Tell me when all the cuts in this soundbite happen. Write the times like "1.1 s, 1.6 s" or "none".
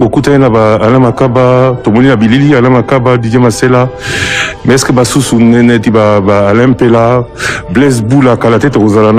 none